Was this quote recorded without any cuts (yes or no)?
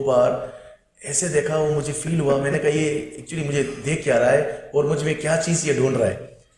yes